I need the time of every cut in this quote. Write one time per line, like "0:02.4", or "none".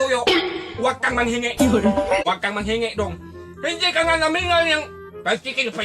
0:02.2